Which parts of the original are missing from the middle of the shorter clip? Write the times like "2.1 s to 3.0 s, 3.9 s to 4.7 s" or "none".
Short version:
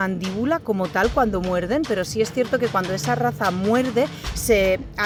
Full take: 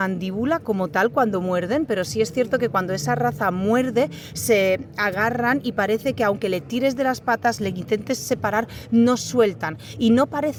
none